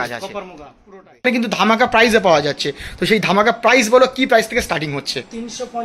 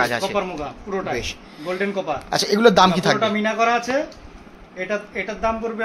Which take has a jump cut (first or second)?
first